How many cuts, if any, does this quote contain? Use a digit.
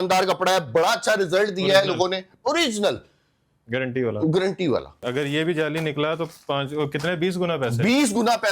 1